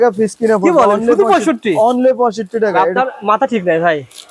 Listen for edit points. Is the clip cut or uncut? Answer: uncut